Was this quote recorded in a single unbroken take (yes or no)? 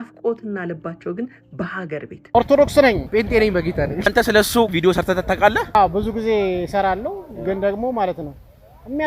no